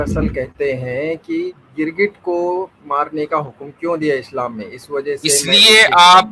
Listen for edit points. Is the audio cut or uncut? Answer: cut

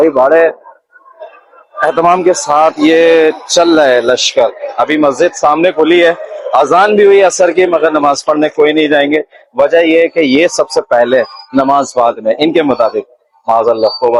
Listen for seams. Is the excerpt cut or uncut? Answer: uncut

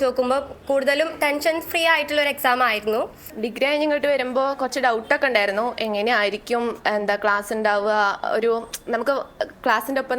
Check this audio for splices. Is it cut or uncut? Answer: cut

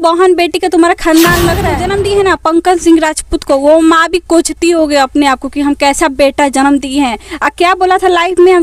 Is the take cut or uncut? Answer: cut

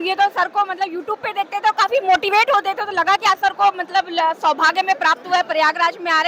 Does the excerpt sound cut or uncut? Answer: uncut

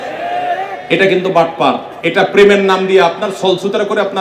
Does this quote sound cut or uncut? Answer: cut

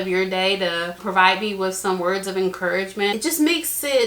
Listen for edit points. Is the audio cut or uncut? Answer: cut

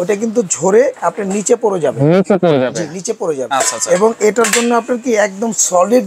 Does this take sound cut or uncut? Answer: cut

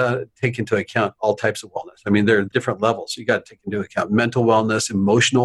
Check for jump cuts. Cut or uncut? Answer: cut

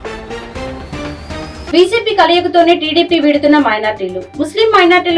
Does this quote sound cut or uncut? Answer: cut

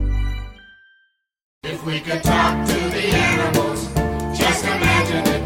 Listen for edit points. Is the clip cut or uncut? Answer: cut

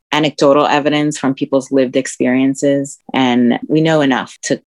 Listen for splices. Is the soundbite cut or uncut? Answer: cut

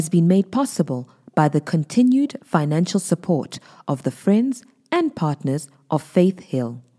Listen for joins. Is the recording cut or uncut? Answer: uncut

